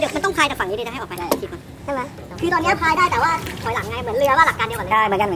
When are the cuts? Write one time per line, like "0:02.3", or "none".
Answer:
0:02.4